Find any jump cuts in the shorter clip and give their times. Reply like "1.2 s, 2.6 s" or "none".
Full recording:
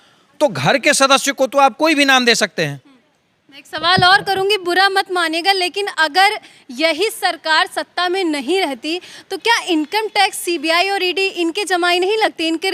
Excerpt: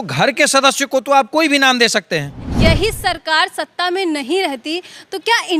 2.4 s